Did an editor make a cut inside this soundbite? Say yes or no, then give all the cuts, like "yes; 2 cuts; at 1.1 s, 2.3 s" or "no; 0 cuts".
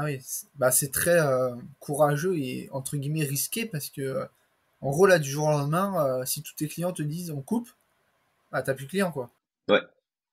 yes; 1 cut; at 9.4 s